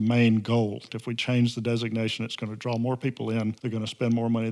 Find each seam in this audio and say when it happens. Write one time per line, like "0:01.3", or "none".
0:00.9
0:03.6